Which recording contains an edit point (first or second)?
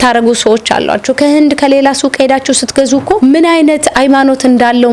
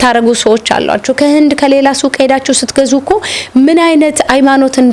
first